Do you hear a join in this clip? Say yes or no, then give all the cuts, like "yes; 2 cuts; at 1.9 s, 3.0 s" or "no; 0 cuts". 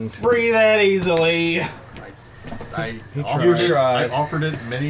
no; 0 cuts